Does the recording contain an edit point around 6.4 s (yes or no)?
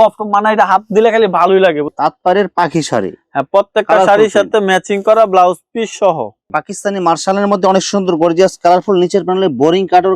yes